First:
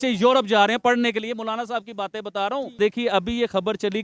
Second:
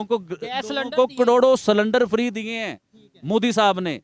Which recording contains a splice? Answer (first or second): first